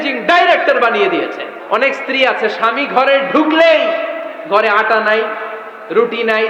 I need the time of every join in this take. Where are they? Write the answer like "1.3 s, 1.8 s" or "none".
1.5 s